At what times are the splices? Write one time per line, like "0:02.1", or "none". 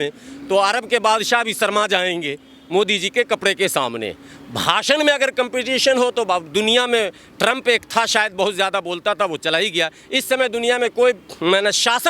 none

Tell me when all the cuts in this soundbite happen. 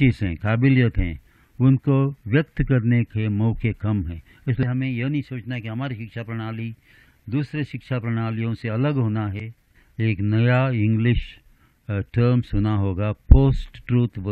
0:04.6
0:09.8

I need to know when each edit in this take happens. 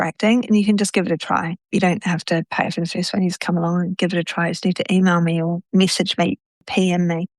0:05.6

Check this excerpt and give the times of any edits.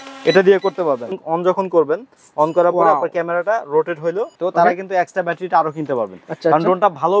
0:01.2
0:04.3

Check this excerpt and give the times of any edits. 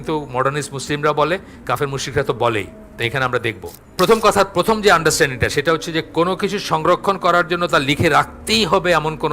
0:03.8

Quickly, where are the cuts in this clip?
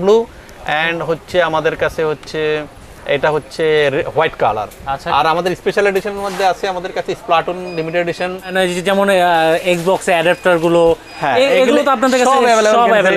0:08.5

